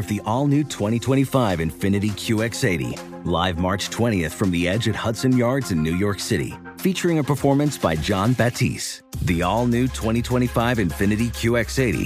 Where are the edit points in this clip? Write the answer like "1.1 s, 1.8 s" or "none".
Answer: none